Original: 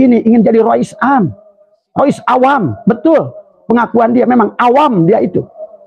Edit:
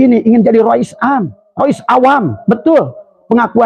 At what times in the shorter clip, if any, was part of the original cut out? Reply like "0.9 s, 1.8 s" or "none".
1.4 s